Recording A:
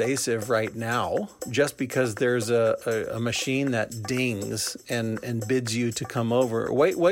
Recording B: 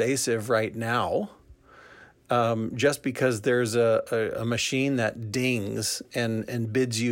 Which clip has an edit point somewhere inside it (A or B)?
A